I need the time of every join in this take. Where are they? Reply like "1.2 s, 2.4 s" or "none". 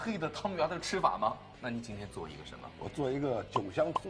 1.5 s, 2.6 s

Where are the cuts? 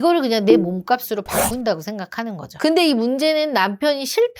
2.5 s

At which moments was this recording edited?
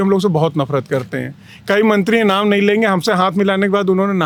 none

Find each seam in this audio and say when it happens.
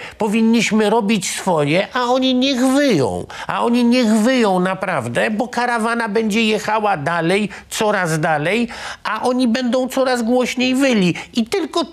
none

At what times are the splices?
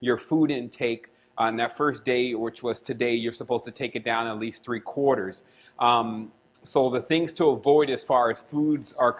1.5 s

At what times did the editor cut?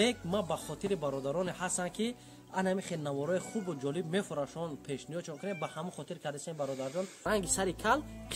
7.2 s

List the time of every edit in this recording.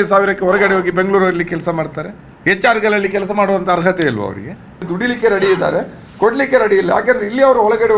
4.8 s

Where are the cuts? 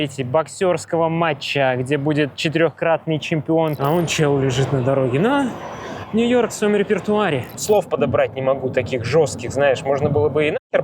3.7 s, 7.5 s

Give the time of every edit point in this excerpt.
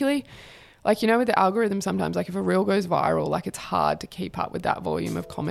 none

